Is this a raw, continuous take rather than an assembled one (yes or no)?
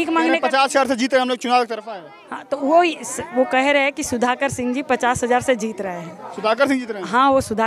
yes